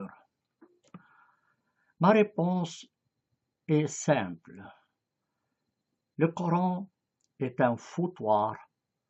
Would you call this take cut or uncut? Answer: uncut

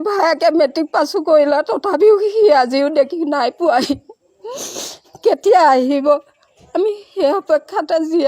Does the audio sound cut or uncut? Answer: uncut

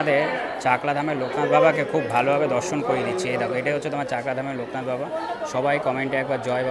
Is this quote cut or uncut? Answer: uncut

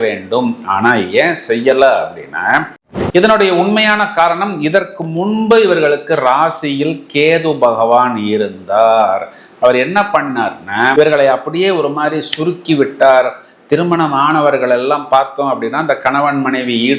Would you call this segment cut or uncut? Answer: cut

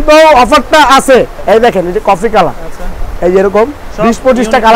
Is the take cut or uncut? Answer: cut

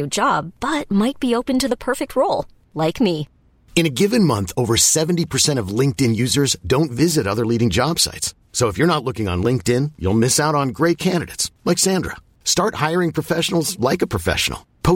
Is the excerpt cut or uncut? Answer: uncut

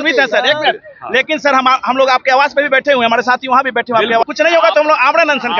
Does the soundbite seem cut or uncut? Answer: cut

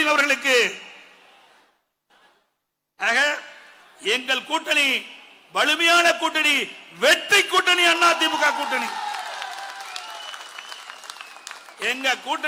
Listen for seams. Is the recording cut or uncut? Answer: uncut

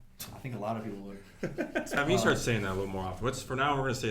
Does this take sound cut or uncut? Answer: cut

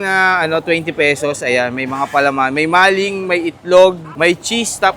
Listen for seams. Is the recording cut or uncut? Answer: cut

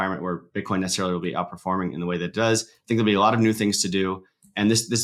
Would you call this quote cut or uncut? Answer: uncut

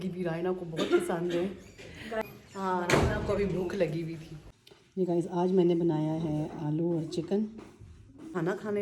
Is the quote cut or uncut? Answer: uncut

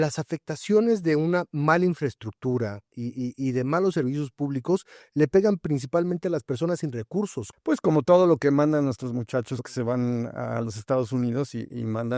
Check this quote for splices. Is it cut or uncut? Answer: cut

